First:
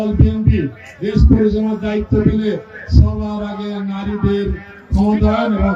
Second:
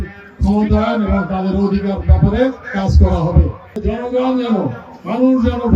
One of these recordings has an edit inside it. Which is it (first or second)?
second